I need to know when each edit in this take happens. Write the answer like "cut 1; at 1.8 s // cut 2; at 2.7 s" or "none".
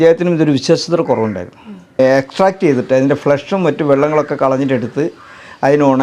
cut 1; at 2.0 s